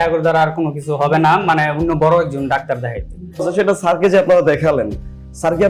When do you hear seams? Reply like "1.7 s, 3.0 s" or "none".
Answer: 3.5 s